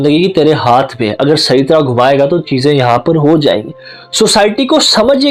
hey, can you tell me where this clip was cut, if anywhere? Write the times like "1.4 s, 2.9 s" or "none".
none